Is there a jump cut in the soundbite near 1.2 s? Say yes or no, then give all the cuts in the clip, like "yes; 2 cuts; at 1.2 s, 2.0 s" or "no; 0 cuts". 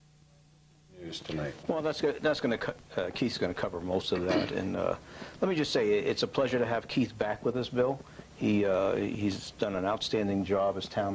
yes; 1 cut; at 1.2 s